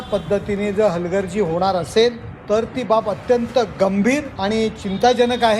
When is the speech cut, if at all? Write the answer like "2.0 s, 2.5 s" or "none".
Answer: 2.3 s, 4.3 s